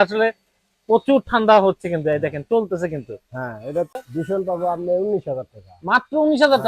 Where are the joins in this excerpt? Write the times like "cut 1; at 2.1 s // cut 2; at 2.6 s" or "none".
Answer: cut 1; at 3.9 s